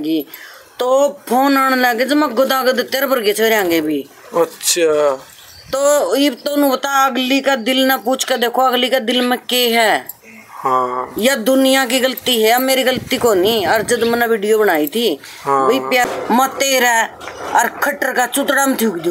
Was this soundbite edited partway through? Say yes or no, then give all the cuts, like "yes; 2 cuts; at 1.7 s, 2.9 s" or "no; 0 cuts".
yes; 1 cut; at 16.0 s